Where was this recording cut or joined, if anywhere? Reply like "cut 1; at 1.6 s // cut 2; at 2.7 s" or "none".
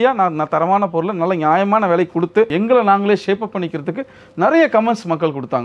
cut 1; at 2.5 s